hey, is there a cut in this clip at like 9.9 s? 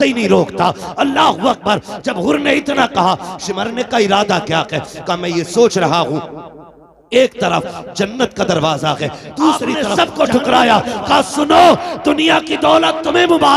yes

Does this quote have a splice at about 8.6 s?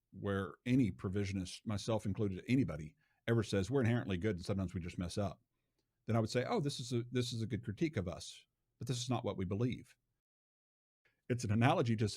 no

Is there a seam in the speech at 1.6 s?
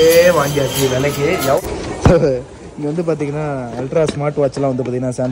yes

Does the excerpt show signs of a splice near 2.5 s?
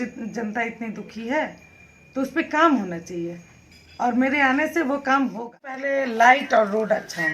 no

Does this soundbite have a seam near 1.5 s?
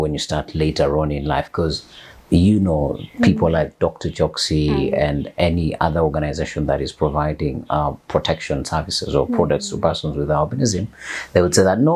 no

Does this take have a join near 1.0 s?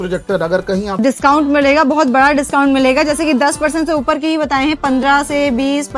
yes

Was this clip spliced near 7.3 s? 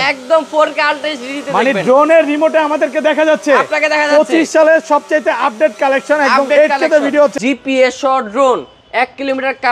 yes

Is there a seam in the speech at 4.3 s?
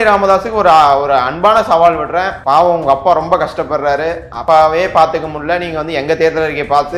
yes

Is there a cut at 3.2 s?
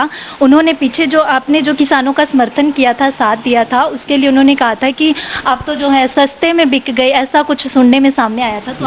no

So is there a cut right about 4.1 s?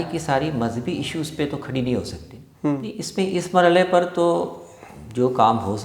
no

